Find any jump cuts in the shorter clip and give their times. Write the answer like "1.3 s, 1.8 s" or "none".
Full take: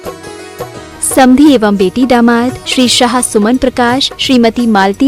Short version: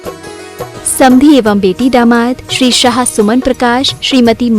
1.0 s